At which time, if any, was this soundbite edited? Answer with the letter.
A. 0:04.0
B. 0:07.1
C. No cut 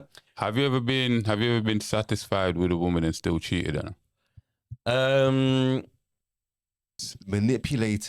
B